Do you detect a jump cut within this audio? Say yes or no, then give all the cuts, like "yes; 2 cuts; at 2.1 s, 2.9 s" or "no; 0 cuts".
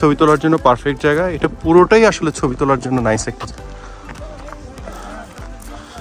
no; 0 cuts